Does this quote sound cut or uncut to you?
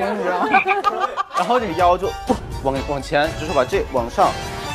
cut